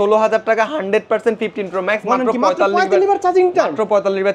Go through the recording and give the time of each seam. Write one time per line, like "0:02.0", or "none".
none